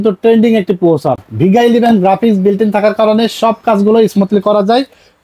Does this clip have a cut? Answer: no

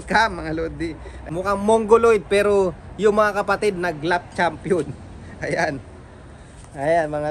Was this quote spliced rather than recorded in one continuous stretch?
yes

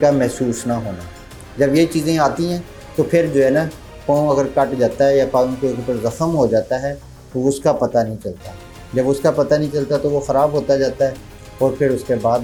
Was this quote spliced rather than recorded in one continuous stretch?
no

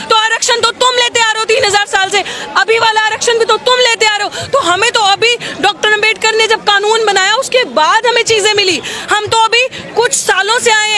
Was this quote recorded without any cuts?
yes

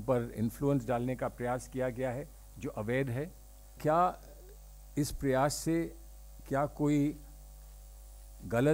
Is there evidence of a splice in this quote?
yes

